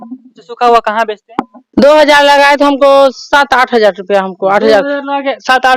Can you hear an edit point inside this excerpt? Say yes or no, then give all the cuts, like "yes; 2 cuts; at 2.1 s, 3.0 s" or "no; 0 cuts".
yes; 1 cut; at 1.6 s